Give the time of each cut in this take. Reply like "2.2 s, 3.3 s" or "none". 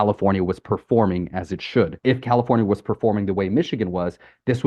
2.0 s

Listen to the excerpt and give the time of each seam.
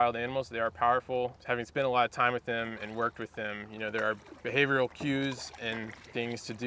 none

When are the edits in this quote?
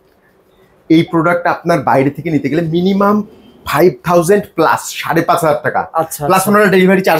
none

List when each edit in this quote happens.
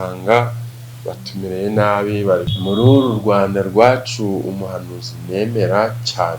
2.5 s

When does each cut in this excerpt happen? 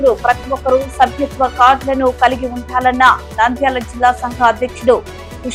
none

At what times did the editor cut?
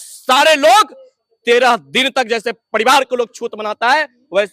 none

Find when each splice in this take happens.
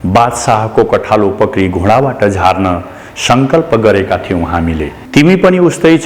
5.0 s

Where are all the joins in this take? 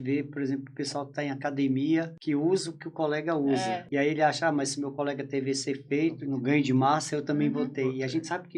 2.1 s, 3.8 s, 6.2 s

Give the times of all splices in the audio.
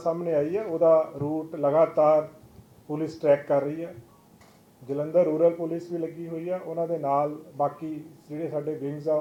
none

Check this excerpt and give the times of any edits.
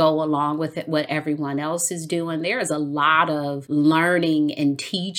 3.6 s

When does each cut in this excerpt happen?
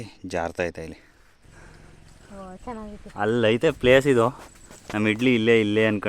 1.4 s

